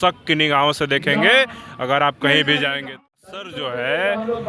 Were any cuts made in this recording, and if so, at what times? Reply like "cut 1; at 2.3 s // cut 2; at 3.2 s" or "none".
cut 1; at 3.5 s

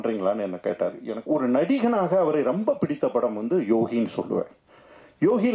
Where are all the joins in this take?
cut 1; at 1.1 s

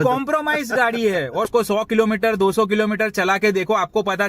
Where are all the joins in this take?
cut 1; at 1.5 s

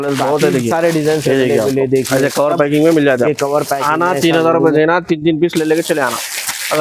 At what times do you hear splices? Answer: none

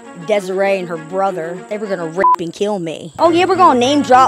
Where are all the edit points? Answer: cut 1; at 3.0 s

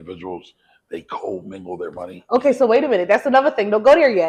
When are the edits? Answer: none

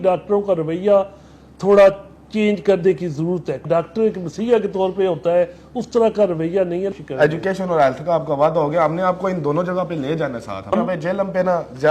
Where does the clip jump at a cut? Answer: cut 1; at 3.6 s // cut 2; at 7.0 s // cut 3; at 10.7 s

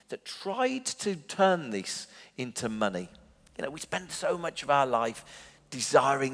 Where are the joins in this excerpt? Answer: none

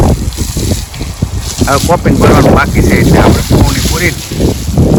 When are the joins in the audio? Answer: none

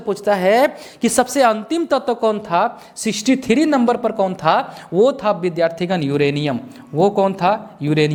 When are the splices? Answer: none

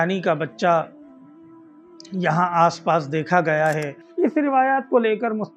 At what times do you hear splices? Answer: cut 1; at 4.0 s

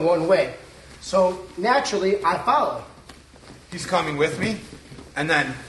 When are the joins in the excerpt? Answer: none

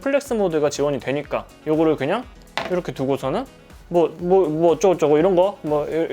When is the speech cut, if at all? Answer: none

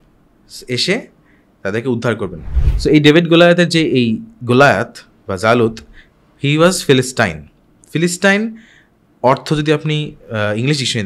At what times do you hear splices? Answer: cut 1; at 2.5 s

